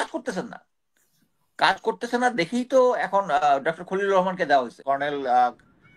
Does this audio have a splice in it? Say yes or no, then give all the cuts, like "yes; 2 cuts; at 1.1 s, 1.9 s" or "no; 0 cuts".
yes; 1 cut; at 4.8 s